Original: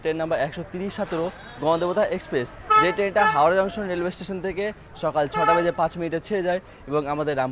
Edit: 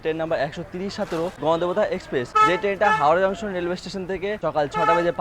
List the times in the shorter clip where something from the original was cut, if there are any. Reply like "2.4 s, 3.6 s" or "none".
1.4 s, 2.3 s, 4.4 s